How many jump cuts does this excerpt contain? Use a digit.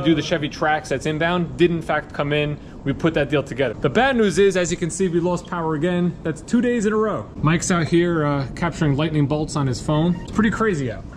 3